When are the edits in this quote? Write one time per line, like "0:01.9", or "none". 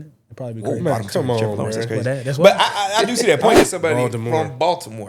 0:03.5